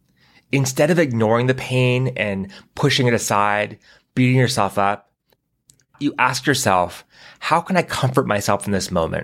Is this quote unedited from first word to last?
no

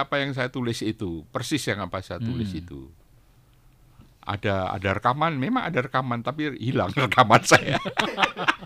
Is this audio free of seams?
yes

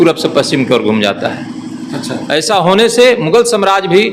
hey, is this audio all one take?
yes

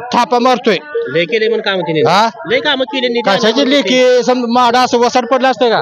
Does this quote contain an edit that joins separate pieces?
no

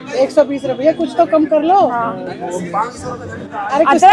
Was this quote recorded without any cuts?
yes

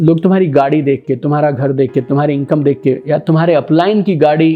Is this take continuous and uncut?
yes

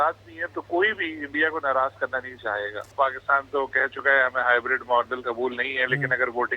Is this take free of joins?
no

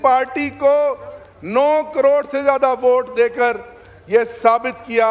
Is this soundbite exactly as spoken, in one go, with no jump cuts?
yes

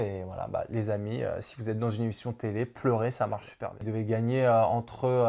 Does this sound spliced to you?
yes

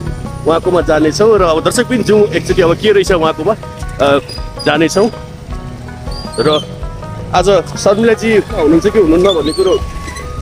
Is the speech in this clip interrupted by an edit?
yes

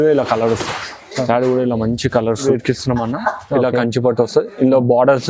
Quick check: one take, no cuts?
no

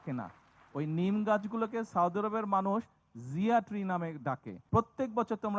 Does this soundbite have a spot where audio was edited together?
yes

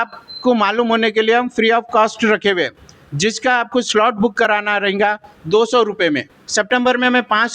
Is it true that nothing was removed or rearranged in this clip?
no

